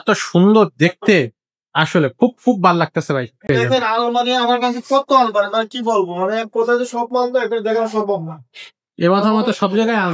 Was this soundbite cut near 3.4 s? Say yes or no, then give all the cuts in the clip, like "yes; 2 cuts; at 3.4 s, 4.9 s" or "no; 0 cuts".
yes; 1 cut; at 3.4 s